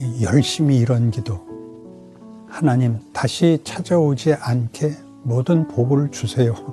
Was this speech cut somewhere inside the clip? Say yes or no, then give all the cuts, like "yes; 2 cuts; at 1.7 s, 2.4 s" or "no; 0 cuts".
no; 0 cuts